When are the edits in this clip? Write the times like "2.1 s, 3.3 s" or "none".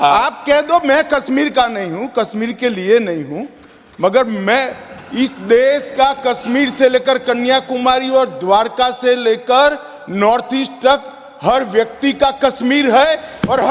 none